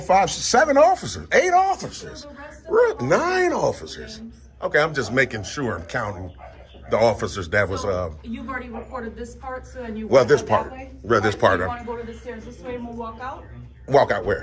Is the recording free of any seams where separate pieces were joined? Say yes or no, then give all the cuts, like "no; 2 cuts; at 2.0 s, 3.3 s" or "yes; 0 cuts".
yes; 0 cuts